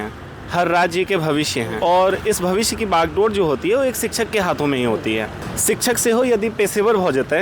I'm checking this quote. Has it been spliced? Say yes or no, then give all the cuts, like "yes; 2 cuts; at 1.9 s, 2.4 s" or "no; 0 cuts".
yes; 2 cuts; at 1.7 s, 5.4 s